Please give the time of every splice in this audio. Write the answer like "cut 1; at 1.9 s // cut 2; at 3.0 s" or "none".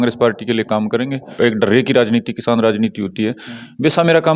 cut 1; at 1.3 s